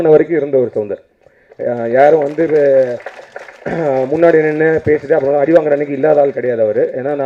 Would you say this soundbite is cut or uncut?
uncut